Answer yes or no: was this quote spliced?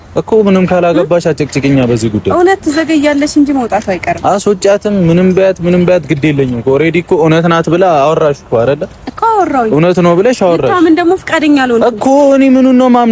no